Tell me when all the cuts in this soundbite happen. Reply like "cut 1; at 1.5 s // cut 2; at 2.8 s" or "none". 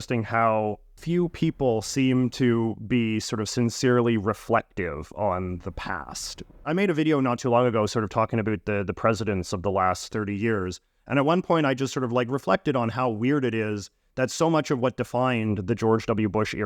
cut 1; at 1.0 s // cut 2; at 6.5 s